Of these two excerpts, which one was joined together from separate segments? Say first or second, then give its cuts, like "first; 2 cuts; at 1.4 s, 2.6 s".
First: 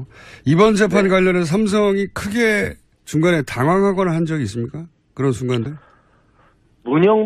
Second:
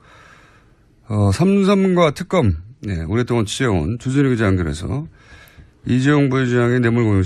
first; 1 cut; at 4.0 s